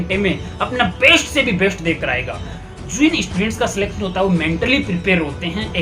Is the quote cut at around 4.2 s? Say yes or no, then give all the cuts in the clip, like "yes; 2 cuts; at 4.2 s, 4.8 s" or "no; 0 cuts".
no; 1 cut; at 2.6 s